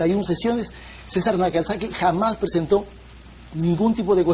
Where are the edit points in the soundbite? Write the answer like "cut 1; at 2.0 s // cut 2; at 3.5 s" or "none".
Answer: cut 1; at 3.1 s